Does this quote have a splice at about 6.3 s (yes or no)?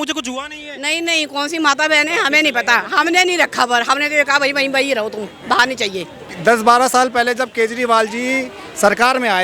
yes